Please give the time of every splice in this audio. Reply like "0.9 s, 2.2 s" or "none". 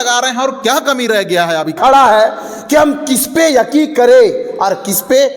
1.8 s

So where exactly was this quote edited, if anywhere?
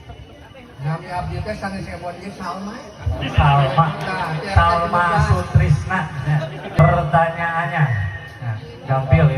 6.8 s

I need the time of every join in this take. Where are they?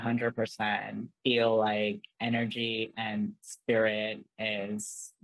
1.0 s, 2.1 s

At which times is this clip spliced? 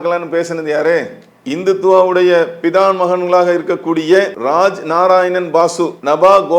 4.4 s

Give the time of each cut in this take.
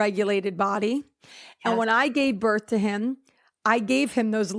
none

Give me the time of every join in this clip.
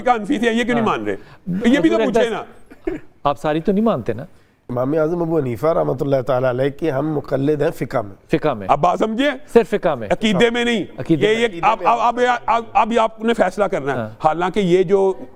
none

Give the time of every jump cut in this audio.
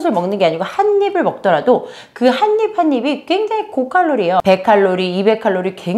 none

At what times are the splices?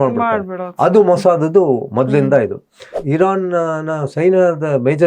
2.9 s

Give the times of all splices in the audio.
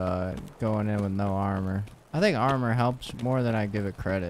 3.1 s

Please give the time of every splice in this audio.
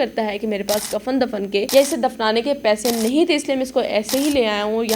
1.7 s

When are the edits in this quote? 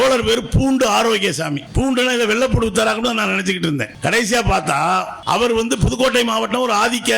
1.6 s, 3.9 s, 5.1 s

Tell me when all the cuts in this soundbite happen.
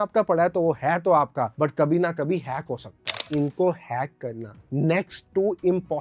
3.1 s

